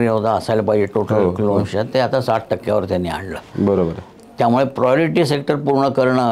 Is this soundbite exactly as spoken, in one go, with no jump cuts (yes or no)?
yes